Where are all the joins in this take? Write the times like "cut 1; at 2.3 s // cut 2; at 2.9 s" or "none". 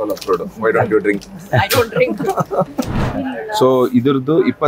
cut 1; at 3.0 s